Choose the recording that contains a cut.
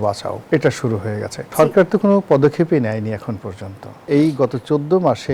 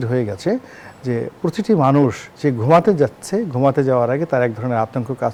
first; 2 cuts; at 1.4 s, 4.0 s

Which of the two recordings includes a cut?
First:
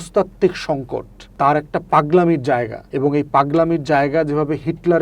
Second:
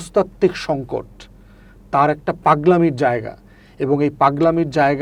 first; 2 cuts; at 1.2 s, 2.8 s

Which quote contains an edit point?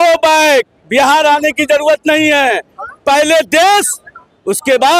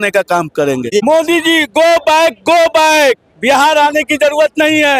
second; 1 cut; at 1.0 s

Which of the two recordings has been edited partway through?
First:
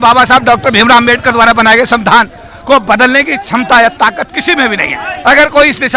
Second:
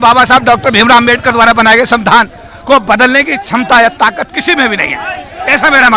first; 1 cut; at 5.0 s

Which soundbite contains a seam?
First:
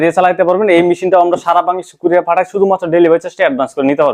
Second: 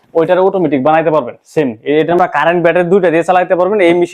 second; 1 cut; at 2.2 s

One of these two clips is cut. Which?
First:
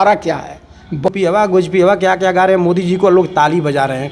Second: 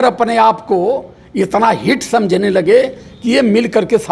first; 1 cut; at 1.1 s

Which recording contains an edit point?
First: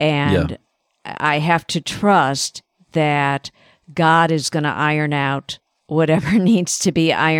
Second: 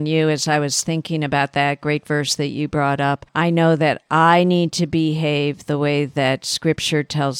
second; 1 cut; at 3.3 s

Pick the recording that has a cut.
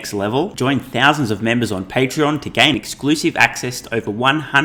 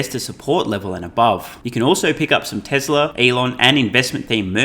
second; 2 cuts; at 1.6 s, 3.1 s

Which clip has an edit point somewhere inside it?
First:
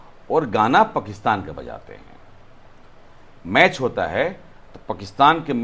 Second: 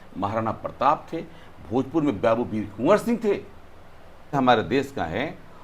second; 1 cut; at 4.3 s

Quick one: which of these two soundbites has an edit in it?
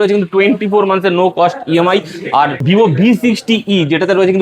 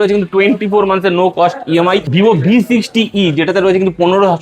second; 1 cut; at 2.1 s

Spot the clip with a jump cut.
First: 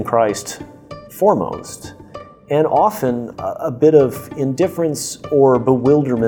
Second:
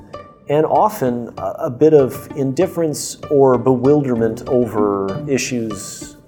second; 1 cut; at 5.2 s

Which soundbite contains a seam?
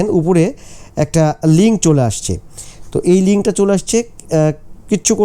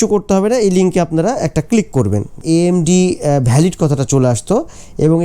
second; 1 cut; at 2.3 s

